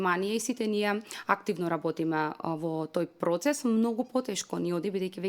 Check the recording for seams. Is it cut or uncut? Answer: uncut